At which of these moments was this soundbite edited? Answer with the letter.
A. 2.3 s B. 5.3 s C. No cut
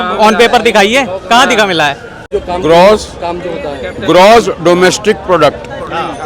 A